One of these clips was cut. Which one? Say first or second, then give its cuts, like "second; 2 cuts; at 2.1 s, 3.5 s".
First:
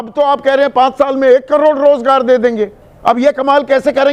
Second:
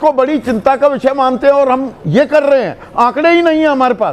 first; 1 cut; at 2.9 s